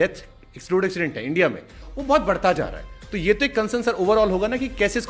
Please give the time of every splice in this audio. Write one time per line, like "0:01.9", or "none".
0:01.9